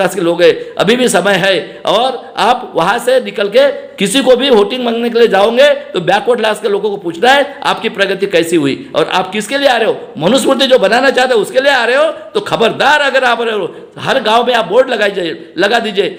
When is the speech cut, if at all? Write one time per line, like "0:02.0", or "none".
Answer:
none